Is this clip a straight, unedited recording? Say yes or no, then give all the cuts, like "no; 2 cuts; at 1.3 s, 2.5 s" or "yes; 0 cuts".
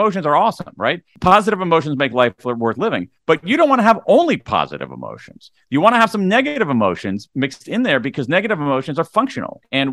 no; 1 cut; at 1.1 s